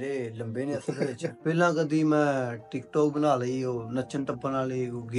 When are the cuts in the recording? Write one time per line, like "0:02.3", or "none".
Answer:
0:01.3